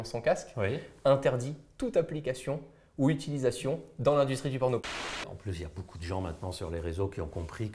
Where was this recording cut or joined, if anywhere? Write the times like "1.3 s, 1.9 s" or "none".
5.1 s